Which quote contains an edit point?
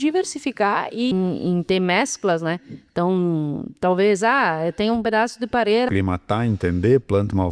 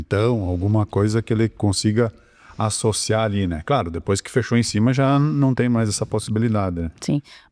first; 2 cuts; at 1.1 s, 5.9 s

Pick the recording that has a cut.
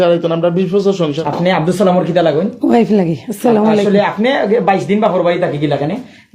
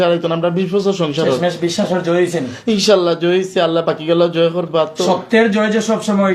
first; 1 cut; at 1.2 s

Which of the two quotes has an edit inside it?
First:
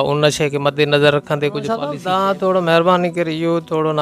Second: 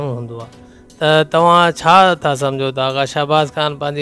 first; 1 cut; at 1.9 s

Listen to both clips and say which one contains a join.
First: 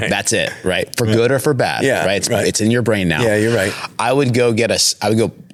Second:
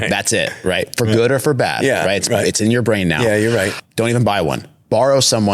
second; 1 cut; at 3.8 s

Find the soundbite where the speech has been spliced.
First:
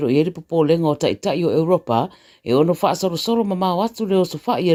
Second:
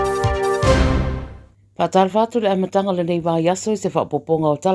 second; 1 cut; at 1.2 s

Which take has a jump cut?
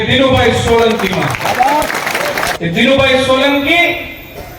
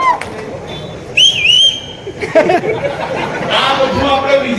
first; 1 cut; at 2.5 s

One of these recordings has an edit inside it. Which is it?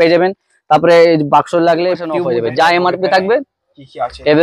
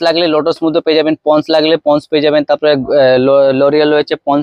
first; 1 cut; at 2.1 s

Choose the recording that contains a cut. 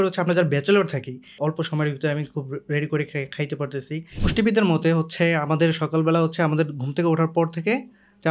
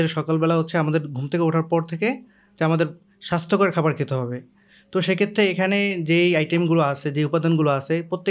first; 2 cuts; at 1.4 s, 4.1 s

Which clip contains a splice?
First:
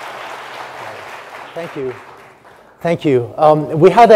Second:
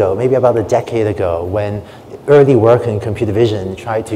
second; 1 cut; at 2.9 s

